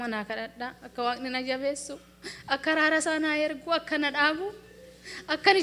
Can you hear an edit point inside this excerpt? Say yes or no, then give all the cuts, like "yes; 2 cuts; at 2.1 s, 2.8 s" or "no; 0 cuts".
no; 0 cuts